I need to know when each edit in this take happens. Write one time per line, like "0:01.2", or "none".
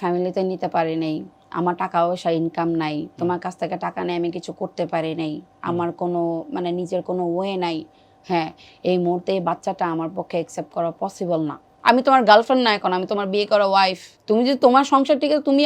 0:11.7
0:14.1